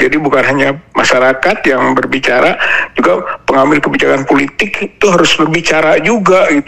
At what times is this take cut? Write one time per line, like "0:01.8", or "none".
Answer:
none